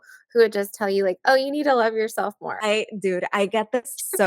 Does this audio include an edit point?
yes; 1 cut; at 2.5 s

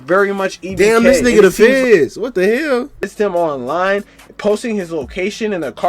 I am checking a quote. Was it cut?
yes; 1 cut; at 3.1 s

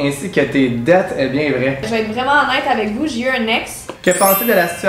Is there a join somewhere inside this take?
yes; 2 cuts; at 1.9 s, 3.9 s

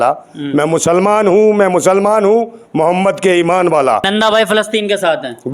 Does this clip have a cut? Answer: yes; 1 cut; at 4.1 s

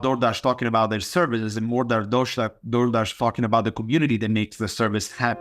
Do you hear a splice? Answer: no; 0 cuts

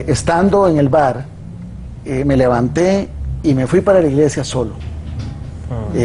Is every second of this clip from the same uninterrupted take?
no; 1 cut; at 4.7 s

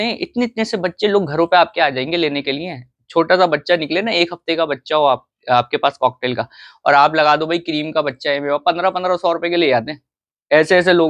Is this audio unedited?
yes; 0 cuts

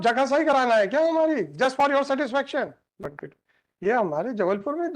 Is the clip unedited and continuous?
no; 1 cut; at 2.9 s

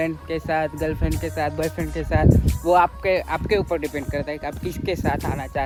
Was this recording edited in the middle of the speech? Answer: no; 0 cuts

